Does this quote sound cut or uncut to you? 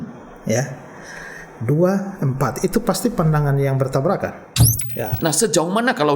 cut